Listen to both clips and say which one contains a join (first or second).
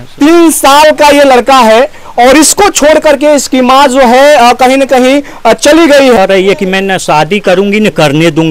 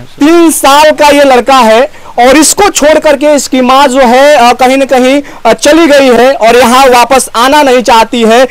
first